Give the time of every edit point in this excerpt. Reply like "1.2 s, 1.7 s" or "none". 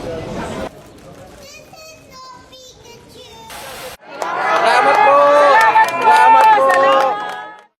3.5 s